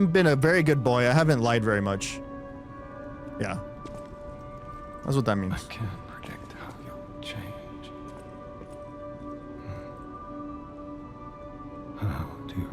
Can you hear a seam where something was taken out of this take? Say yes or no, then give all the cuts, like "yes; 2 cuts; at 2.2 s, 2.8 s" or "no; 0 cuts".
no; 0 cuts